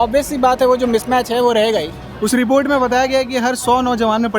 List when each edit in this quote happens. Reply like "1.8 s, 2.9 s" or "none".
2.0 s